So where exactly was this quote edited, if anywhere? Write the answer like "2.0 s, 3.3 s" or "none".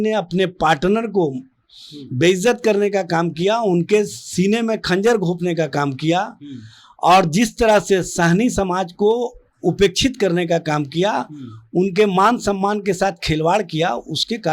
none